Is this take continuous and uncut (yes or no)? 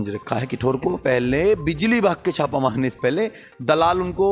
no